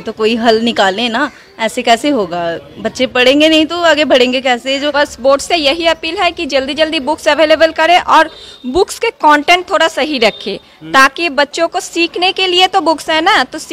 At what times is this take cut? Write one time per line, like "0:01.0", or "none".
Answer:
0:04.9